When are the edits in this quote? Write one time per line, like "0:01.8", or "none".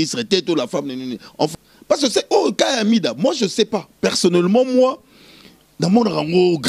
0:01.5